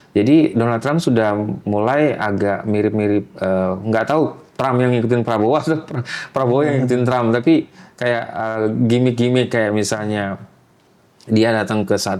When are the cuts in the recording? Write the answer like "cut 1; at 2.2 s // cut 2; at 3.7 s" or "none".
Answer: none